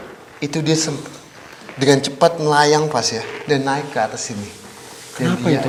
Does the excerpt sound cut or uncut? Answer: uncut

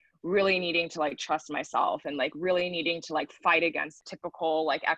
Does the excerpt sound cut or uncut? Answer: cut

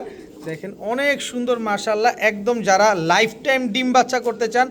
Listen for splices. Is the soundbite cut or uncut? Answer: uncut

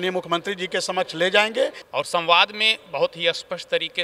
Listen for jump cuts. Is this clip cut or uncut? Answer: cut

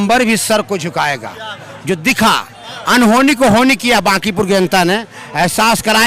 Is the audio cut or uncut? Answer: uncut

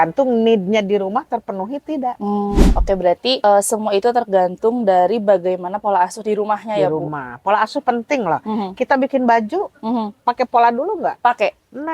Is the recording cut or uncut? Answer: cut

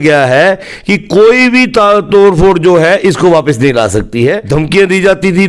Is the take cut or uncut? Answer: cut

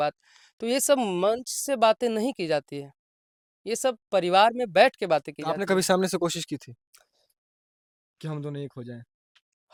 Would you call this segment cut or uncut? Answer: uncut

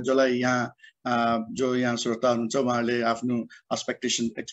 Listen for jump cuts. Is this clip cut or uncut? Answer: uncut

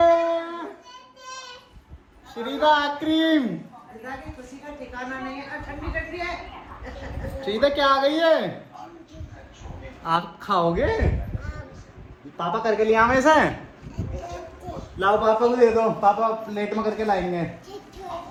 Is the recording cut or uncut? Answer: uncut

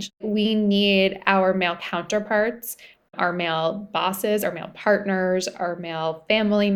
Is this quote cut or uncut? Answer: cut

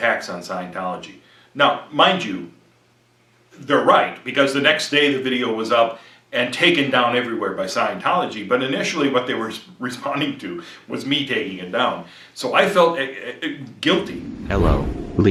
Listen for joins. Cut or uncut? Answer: uncut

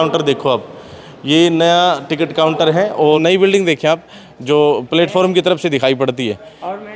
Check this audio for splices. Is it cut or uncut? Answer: cut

